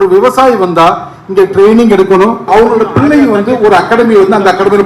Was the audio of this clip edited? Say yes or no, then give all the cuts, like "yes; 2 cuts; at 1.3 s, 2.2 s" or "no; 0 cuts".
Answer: yes; 1 cut; at 2.5 s